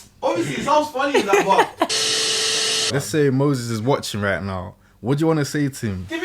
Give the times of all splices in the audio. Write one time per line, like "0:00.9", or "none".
0:01.9